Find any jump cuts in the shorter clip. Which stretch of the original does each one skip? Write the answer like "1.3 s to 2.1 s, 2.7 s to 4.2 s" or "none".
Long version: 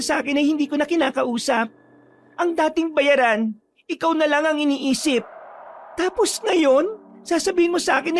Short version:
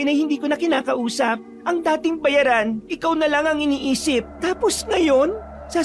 1.8 s to 2.2 s, 3.6 s to 3.9 s, 5.3 s to 5.9 s